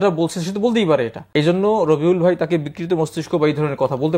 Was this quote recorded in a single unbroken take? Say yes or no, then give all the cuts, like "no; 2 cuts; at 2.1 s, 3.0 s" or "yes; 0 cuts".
no; 1 cut; at 1.2 s